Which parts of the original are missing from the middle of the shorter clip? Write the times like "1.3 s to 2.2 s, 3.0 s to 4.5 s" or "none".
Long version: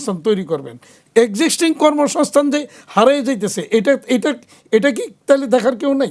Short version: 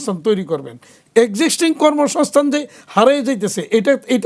none